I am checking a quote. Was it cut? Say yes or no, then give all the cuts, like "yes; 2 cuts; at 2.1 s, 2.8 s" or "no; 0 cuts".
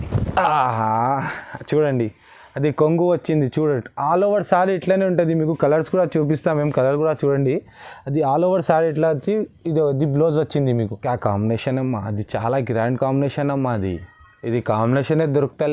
yes; 1 cut; at 10.9 s